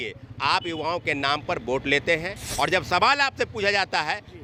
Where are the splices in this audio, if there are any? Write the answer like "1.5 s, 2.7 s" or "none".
none